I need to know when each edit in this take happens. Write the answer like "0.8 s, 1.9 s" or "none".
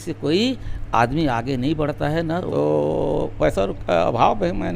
2.5 s